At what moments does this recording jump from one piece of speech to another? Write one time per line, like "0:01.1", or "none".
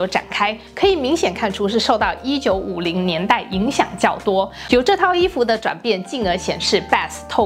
0:04.6